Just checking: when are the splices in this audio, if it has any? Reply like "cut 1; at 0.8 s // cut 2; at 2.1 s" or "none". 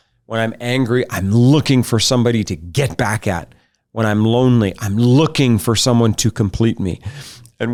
none